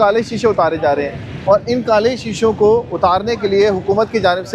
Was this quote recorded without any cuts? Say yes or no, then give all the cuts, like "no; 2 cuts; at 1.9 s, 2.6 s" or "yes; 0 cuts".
yes; 0 cuts